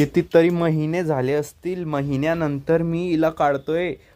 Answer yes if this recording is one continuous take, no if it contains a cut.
yes